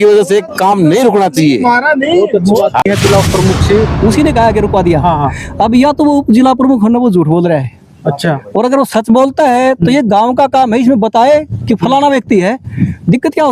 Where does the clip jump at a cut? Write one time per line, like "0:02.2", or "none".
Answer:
0:02.8